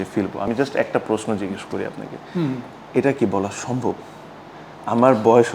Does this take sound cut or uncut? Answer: uncut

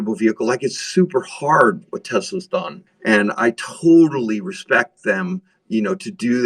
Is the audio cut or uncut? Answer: uncut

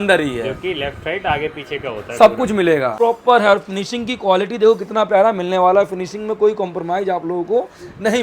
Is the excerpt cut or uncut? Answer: cut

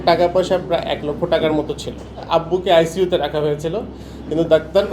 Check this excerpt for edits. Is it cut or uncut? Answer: cut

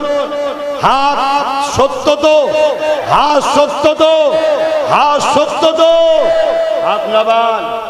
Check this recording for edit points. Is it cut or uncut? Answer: uncut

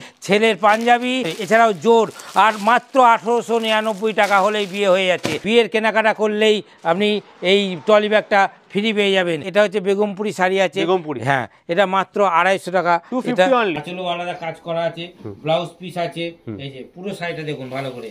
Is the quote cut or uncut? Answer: cut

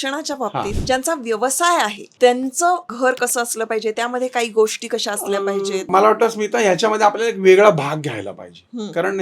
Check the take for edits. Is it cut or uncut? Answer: cut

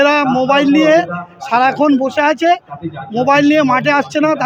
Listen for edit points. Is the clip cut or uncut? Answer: uncut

